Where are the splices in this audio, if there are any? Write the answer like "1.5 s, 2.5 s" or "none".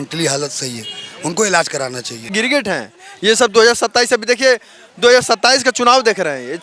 2.3 s

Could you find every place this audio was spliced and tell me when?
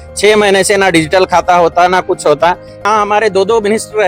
2.8 s

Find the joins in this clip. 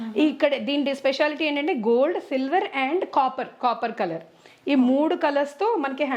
none

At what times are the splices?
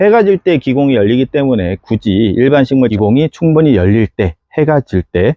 2.9 s

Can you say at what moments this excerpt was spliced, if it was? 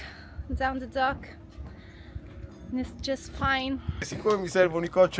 4.1 s

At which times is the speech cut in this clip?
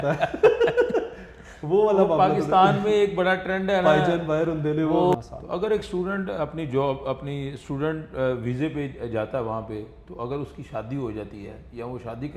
none

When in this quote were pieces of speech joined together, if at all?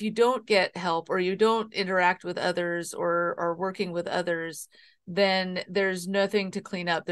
none

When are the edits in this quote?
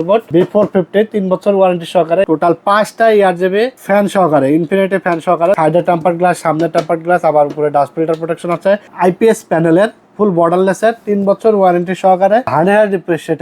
2.2 s, 3.8 s, 5.6 s, 8.9 s, 12.5 s

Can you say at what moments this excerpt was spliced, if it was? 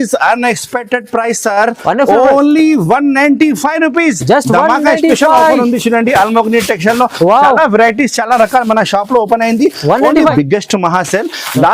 10.3 s

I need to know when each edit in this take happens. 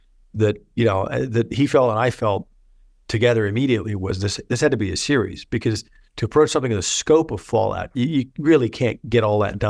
none

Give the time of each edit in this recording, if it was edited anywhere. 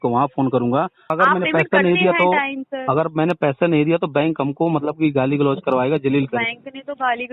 1.1 s

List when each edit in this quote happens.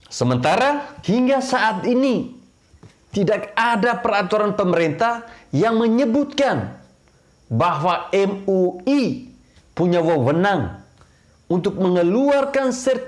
0.9 s

